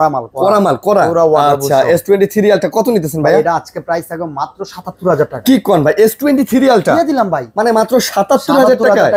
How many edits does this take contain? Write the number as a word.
zero